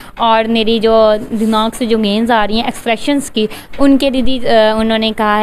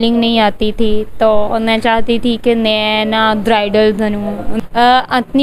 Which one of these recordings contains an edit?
second; 1 cut; at 4.5 s

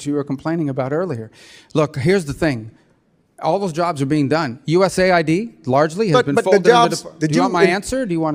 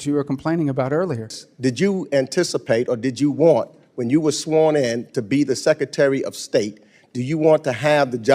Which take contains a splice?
second; 1 cut; at 1.4 s

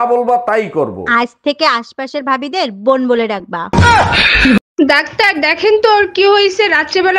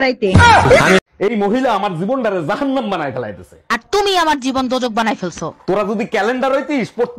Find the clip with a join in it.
first; 1 cut; at 4.7 s

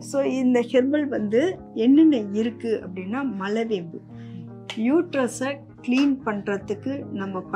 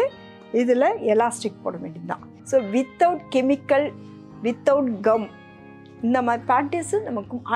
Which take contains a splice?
first; 1 cut; at 5.7 s

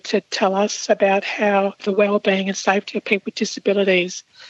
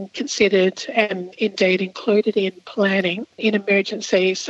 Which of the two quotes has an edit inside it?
second; 1 cut; at 3.3 s

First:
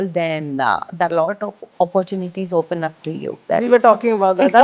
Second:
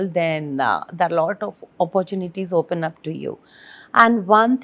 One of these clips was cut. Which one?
first; 1 cut; at 3.4 s

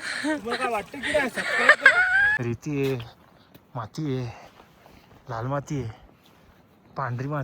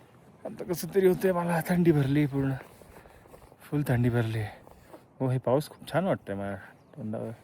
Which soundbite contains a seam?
first; 1 cut; at 2.3 s

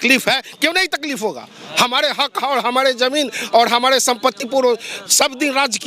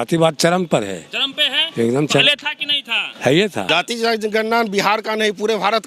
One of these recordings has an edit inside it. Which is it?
second; 1 cut; at 3.7 s

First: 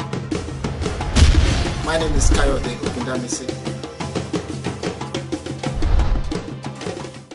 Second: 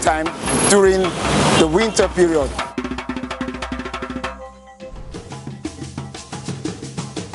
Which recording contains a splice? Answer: first; 1 cut; at 6.4 s

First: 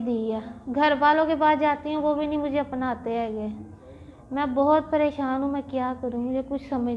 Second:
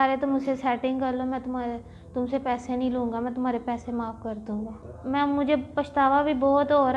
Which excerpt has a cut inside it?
second; 1 cut; at 4.9 s

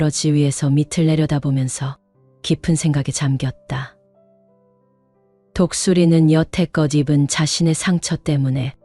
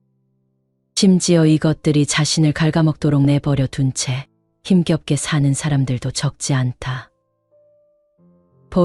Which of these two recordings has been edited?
first; 2 cuts; at 3.9 s, 5.5 s

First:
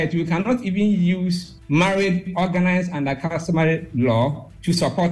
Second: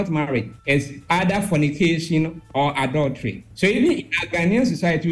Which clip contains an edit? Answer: second; 1 cut; at 3.5 s

